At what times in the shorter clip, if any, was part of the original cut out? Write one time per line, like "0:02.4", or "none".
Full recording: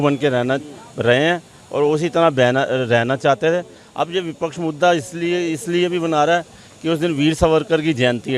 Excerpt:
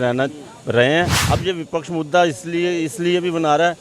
0:01.2